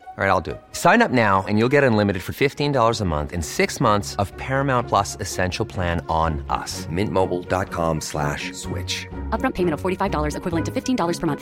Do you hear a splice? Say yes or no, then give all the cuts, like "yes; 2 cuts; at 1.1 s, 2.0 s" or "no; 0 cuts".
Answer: no; 0 cuts